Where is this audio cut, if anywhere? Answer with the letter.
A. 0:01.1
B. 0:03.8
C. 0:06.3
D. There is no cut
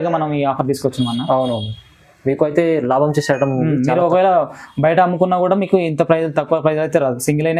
D